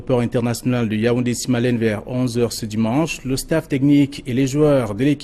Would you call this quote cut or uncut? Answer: uncut